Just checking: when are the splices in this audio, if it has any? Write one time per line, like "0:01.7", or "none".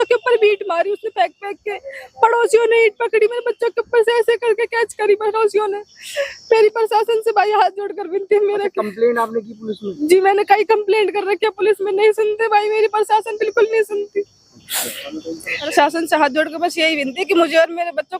0:15.7